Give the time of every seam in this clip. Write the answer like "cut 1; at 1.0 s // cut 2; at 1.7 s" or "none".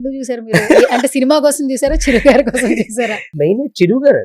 cut 1; at 3.4 s